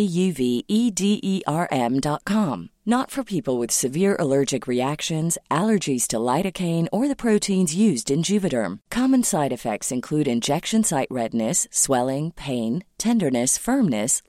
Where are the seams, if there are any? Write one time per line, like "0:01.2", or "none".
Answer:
none